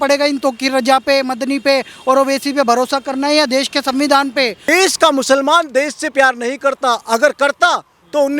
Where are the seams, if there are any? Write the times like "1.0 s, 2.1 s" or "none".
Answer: 4.7 s